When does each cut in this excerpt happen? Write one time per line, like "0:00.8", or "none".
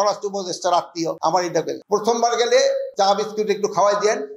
0:01.8